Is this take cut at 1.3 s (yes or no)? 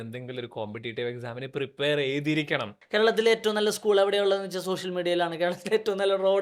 no